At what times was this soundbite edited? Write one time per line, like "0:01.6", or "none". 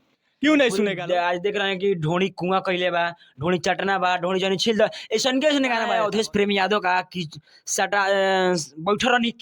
0:01.0
0:05.9

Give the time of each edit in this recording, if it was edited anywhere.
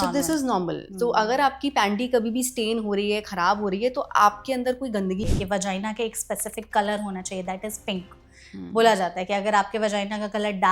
0:05.2

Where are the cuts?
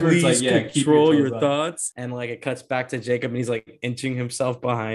0:01.9

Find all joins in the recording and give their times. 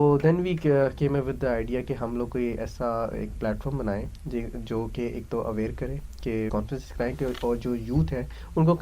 0:06.5

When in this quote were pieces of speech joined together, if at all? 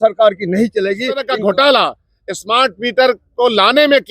0:01.3

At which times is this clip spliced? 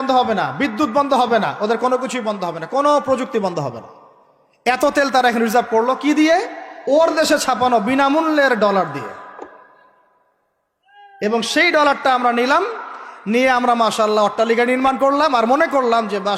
none

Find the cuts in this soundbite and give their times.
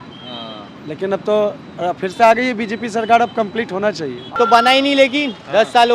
0:04.4

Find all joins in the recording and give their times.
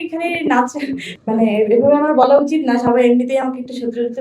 0:01.1

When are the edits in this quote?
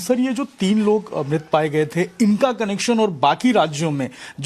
0:01.4

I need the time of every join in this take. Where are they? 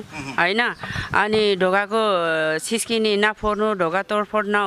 none

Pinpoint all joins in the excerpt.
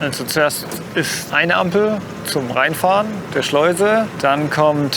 0:01.2
0:02.2
0:03.2
0:04.1

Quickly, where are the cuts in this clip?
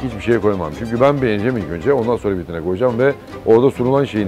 none

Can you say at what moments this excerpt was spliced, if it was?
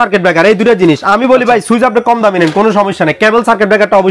none

